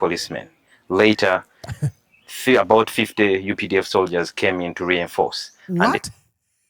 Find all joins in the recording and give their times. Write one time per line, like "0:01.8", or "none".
0:05.5